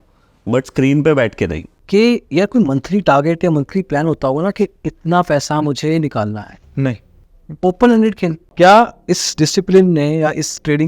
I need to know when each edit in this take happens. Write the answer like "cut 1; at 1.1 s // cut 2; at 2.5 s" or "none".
cut 1; at 1.7 s // cut 2; at 8.4 s